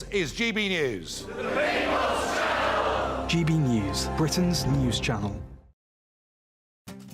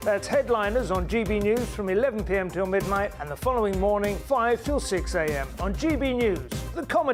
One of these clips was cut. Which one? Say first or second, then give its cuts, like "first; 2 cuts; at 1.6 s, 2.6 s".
first; 1 cut; at 6.1 s